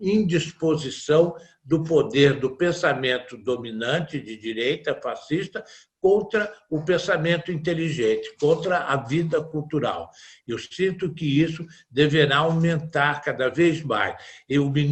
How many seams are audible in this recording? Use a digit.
0